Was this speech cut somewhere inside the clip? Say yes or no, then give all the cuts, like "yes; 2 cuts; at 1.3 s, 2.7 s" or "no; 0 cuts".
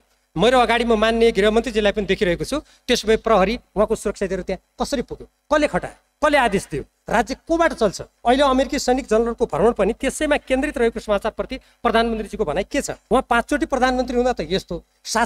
yes; 2 cuts; at 8.1 s, 12.9 s